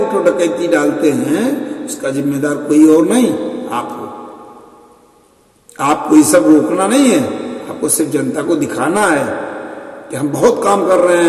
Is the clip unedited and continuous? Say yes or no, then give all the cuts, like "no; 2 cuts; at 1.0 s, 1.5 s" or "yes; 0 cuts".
yes; 0 cuts